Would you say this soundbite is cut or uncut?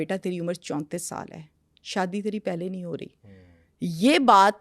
uncut